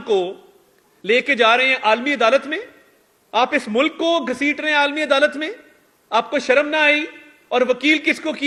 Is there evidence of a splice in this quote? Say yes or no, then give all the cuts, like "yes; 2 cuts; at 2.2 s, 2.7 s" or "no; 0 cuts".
no; 0 cuts